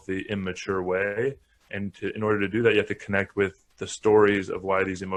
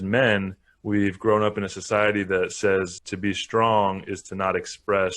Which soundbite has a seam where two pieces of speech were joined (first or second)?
second